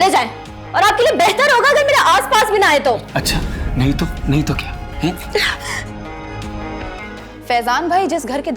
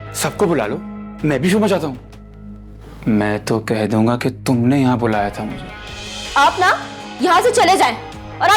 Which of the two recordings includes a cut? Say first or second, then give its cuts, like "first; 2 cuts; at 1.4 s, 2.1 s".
first; 1 cut; at 7.0 s